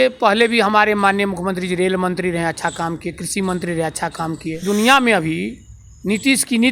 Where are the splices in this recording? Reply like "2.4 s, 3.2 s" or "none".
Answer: 4.6 s